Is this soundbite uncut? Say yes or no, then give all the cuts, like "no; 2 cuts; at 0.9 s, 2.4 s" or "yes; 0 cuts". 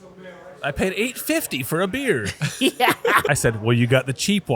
no; 1 cut; at 3.2 s